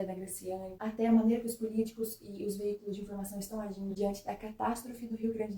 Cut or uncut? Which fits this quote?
uncut